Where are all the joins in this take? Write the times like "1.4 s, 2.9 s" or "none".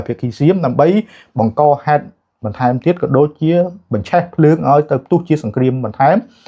none